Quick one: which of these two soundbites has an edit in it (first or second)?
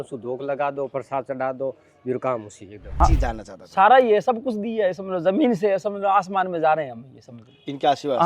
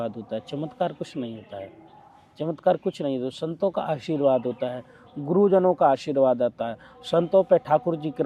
first